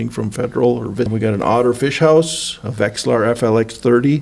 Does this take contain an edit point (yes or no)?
yes